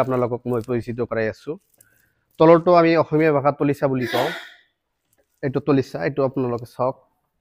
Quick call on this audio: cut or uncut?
uncut